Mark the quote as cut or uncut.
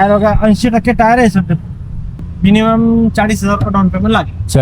cut